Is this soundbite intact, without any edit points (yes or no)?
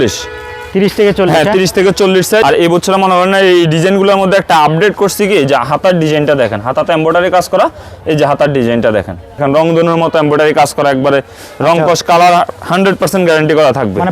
no